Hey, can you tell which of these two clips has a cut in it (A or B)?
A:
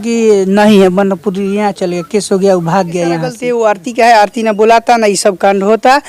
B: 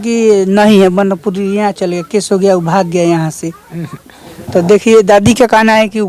A